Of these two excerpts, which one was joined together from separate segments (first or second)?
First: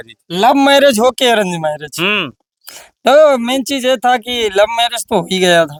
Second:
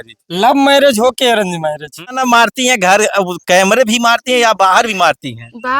second